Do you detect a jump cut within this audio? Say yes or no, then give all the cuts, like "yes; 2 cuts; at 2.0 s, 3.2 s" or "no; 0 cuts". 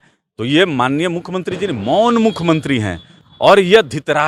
no; 0 cuts